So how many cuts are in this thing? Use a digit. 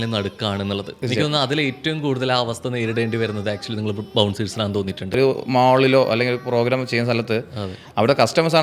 2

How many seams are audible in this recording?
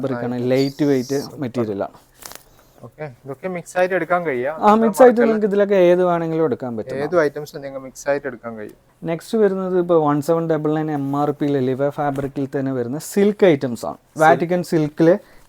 0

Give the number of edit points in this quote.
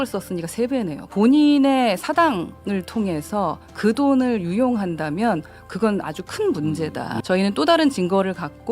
2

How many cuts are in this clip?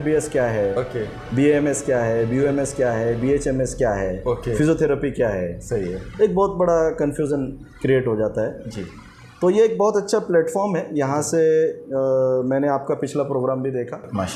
0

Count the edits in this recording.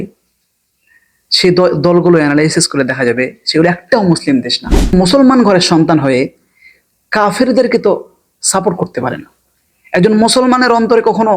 1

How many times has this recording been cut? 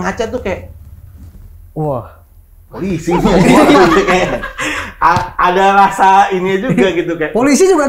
0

